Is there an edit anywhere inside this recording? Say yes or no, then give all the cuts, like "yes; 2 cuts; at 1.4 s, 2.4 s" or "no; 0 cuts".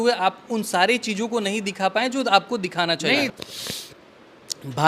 yes; 1 cut; at 3.3 s